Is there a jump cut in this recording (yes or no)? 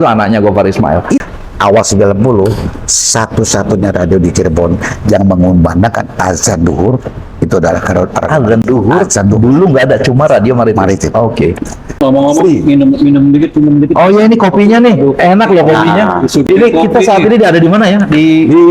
yes